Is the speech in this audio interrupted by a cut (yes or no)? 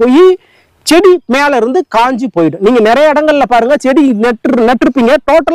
no